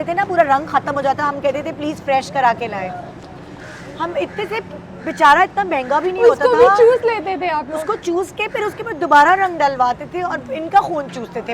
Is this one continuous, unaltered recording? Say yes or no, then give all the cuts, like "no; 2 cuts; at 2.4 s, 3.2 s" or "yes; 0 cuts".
yes; 0 cuts